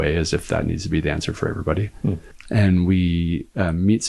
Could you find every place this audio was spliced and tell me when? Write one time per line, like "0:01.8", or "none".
0:02.3

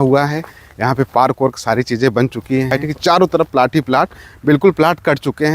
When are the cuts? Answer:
0:02.8

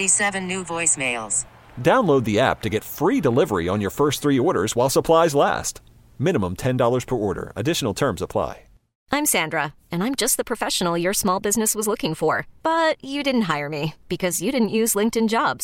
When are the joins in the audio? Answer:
0:09.0

